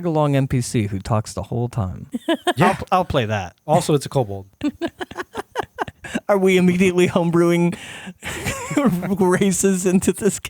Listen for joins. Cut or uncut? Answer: cut